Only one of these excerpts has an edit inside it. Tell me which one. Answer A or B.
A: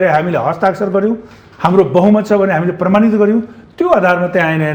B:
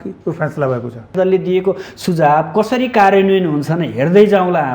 B